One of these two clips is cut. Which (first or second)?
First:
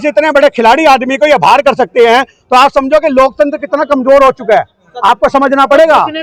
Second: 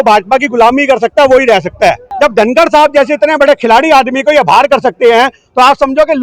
second